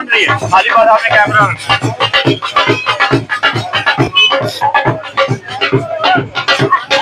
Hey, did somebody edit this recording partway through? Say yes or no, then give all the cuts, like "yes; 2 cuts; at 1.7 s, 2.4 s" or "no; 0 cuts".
no; 0 cuts